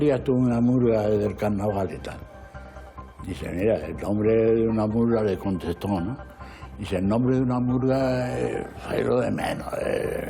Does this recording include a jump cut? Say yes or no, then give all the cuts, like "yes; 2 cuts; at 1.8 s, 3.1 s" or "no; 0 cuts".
no; 0 cuts